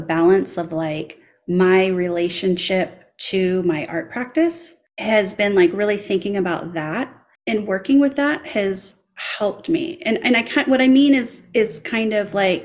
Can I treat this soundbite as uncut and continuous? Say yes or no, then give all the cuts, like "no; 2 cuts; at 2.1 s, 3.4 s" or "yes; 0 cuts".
yes; 0 cuts